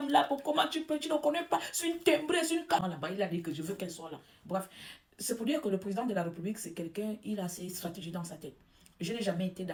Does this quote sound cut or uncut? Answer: uncut